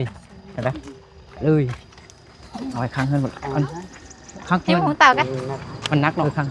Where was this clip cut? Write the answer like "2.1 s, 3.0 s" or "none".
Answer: none